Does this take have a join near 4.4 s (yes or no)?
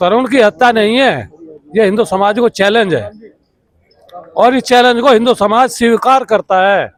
no